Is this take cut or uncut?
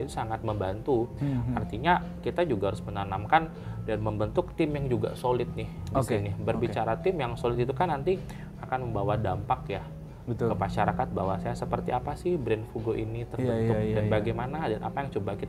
uncut